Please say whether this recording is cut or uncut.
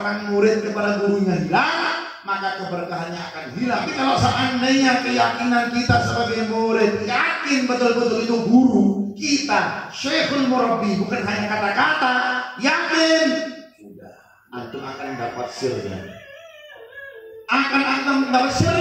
cut